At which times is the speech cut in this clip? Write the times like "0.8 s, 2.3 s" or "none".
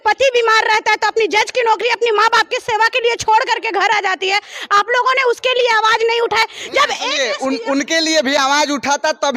none